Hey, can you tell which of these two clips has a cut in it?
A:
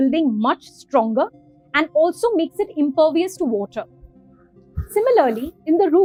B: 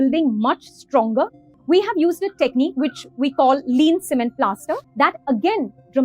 B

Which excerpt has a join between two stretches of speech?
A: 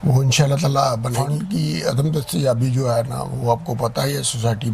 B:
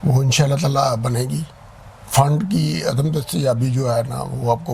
A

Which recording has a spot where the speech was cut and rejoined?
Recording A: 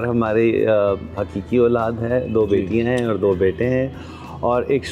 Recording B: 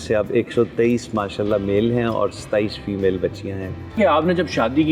B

